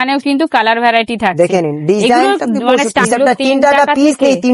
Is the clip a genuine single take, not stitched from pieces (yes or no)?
no